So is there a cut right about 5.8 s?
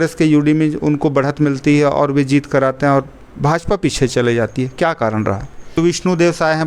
yes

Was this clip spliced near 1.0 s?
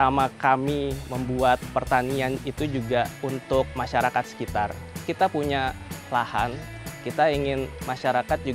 yes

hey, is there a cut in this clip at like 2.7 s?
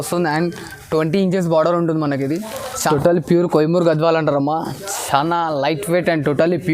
yes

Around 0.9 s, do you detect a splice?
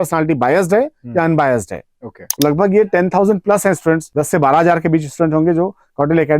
no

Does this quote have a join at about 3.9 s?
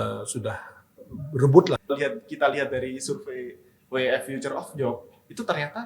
no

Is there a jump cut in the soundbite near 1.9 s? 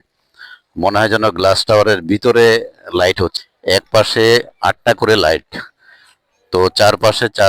no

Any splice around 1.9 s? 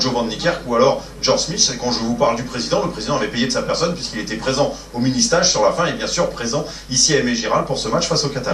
no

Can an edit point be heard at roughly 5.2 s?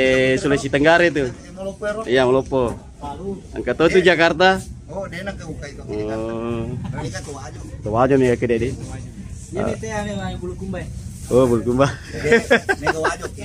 no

